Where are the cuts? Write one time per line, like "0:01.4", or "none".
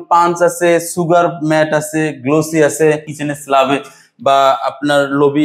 0:03.1